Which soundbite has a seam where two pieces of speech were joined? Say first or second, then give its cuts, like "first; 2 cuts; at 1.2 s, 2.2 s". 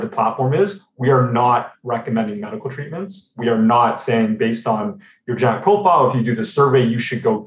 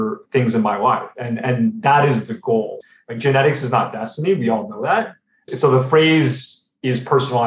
second; 2 cuts; at 2.8 s, 5.4 s